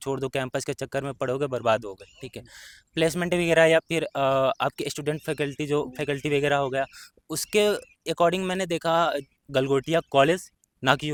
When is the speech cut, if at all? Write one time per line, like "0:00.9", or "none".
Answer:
none